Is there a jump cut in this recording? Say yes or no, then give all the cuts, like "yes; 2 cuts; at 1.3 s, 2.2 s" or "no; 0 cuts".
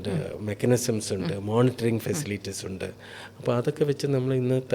no; 0 cuts